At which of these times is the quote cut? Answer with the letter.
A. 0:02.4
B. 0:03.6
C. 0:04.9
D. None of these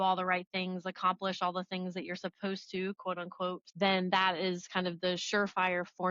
B